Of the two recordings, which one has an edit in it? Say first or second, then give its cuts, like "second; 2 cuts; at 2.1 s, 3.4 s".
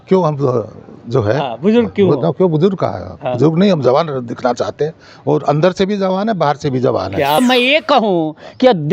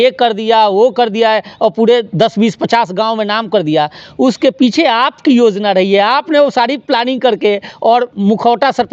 first; 1 cut; at 7.4 s